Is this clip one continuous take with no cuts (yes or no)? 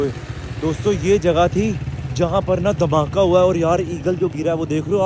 yes